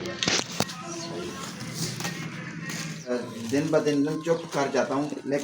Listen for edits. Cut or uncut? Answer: cut